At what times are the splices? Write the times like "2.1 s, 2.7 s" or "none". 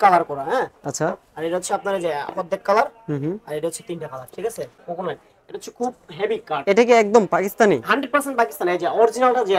4.8 s